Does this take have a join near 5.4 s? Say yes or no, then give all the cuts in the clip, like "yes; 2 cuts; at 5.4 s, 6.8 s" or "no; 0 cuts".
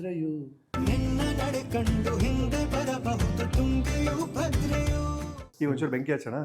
yes; 1 cut; at 5.4 s